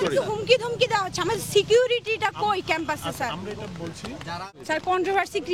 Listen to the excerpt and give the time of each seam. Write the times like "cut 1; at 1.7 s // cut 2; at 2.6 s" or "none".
cut 1; at 4.5 s